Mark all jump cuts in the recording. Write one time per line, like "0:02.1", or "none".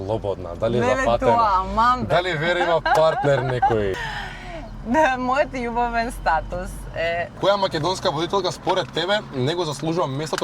0:04.0
0:07.3